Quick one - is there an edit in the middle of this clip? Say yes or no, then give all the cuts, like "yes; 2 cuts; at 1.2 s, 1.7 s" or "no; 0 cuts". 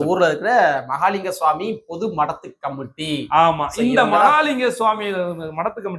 no; 0 cuts